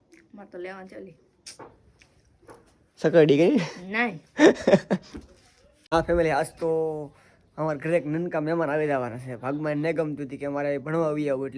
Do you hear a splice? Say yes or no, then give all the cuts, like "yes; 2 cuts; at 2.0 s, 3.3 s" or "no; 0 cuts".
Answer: yes; 1 cut; at 5.9 s